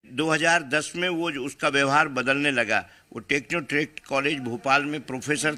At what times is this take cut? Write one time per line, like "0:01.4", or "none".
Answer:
none